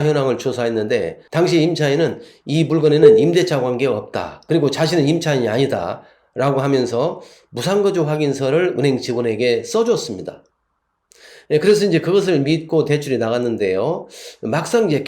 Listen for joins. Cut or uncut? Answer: cut